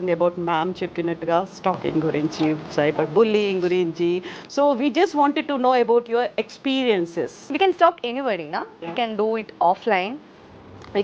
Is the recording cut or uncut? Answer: cut